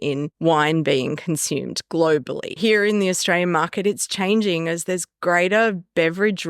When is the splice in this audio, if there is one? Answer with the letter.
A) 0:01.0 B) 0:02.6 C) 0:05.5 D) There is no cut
B